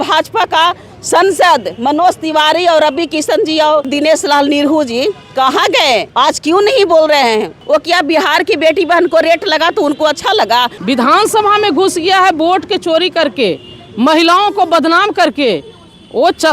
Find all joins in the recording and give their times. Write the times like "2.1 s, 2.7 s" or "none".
3.9 s, 6.1 s, 7.6 s, 10.7 s